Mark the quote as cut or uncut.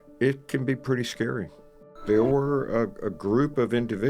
cut